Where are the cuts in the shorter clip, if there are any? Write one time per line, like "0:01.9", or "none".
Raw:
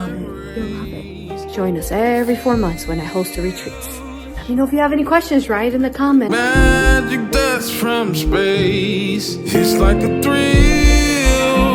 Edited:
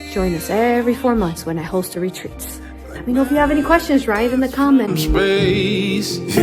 0:04.9